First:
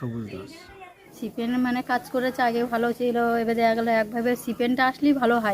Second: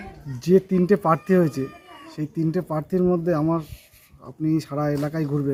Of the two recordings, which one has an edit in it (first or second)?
first